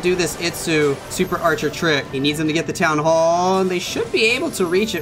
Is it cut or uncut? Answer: cut